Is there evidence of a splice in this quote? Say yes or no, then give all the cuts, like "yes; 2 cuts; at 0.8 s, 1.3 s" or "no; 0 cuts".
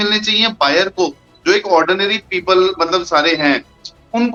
no; 0 cuts